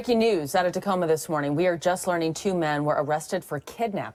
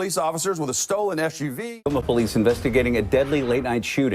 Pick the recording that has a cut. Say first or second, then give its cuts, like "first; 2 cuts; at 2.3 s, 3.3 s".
second; 1 cut; at 1.6 s